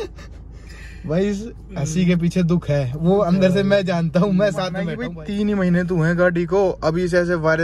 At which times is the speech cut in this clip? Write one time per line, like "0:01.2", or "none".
0:05.0